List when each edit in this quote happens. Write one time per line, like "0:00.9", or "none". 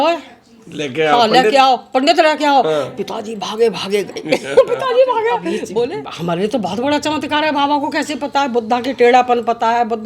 0:06.1